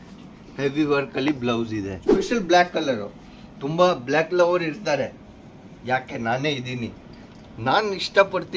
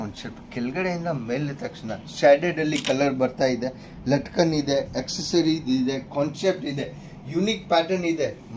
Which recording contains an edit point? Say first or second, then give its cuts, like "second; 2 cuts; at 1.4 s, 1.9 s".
first; 1 cut; at 2.3 s